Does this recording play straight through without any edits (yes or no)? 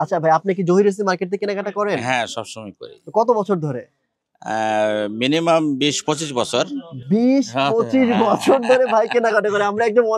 yes